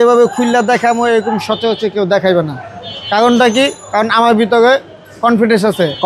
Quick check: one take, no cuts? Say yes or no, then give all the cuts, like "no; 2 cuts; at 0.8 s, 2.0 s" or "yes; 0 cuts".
yes; 0 cuts